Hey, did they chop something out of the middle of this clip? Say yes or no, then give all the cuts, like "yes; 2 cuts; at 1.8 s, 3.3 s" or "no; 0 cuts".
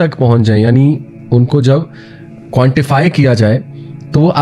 no; 0 cuts